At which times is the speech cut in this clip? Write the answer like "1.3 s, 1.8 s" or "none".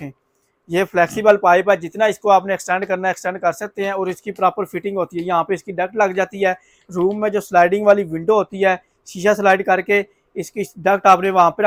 none